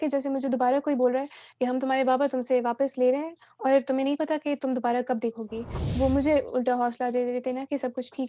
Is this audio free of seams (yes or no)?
no